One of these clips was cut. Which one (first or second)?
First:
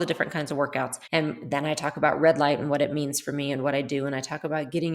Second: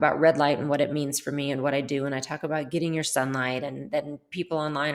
first